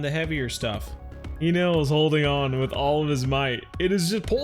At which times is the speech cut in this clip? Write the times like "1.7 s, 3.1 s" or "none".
1.3 s